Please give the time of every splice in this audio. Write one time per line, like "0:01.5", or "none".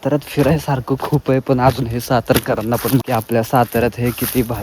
0:03.1